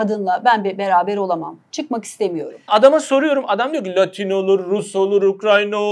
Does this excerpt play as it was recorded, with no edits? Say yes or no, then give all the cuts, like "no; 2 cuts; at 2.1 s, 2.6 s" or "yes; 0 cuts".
no; 1 cut; at 2.7 s